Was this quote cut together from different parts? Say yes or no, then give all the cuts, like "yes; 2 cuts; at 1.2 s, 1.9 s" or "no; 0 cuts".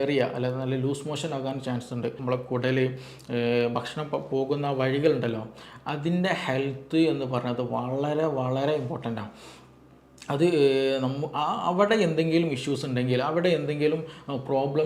yes; 1 cut; at 2.2 s